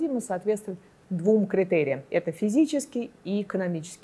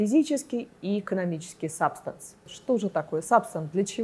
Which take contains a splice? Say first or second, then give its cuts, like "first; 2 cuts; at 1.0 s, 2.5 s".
second; 1 cut; at 2.5 s